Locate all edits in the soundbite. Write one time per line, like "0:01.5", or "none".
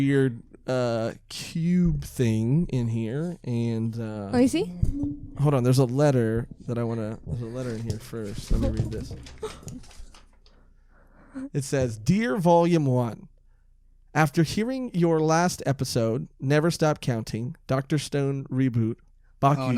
none

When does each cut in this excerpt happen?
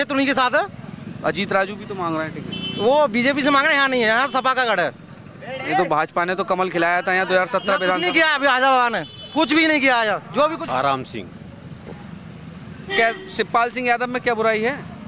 0:10.6

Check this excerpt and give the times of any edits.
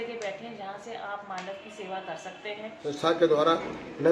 0:02.9

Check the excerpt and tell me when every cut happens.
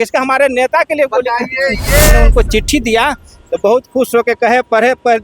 0:02.1

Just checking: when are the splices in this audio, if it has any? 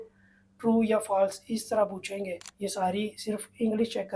0:02.4

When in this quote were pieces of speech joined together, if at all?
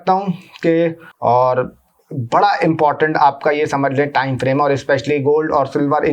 0:01.1

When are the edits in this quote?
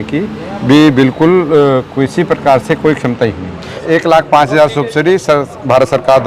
0:03.7

